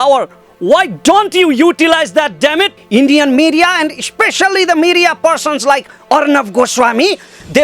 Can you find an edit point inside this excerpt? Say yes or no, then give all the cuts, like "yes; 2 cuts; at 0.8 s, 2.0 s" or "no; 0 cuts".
yes; 1 cut; at 2.8 s